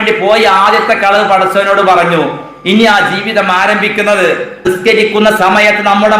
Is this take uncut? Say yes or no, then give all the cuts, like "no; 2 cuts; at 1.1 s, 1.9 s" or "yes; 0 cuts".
no; 1 cut; at 4.6 s